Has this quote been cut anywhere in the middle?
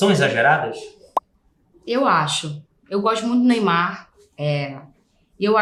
no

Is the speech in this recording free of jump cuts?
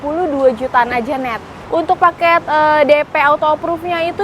no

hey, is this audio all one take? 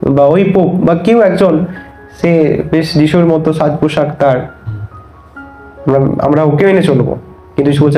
yes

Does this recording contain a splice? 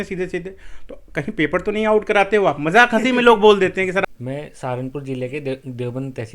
yes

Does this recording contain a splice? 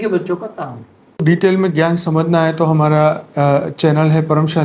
yes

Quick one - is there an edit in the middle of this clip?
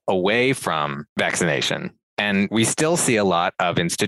yes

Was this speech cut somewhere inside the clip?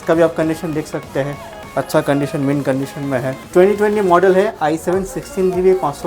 yes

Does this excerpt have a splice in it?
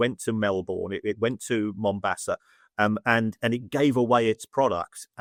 no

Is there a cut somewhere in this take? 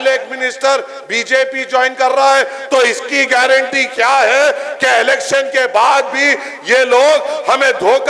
no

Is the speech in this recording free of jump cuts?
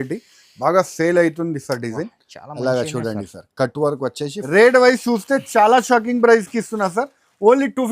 no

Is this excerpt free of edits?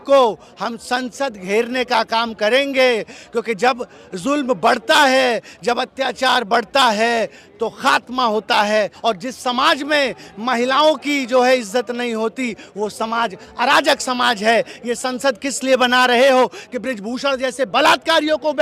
no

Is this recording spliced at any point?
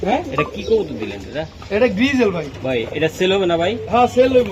no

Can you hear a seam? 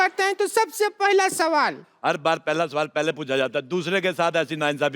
yes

